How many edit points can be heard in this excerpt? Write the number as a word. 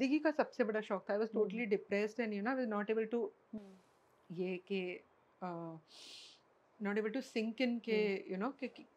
zero